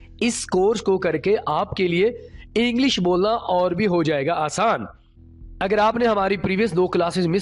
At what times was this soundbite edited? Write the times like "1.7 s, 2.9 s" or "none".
none